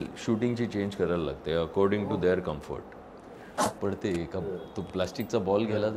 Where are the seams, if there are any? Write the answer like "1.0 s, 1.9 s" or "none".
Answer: 3.7 s